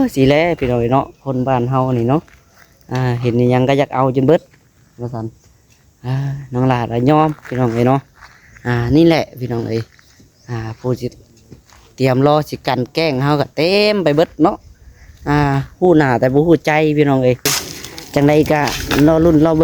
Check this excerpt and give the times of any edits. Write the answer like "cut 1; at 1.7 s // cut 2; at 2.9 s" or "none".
cut 1; at 17.7 s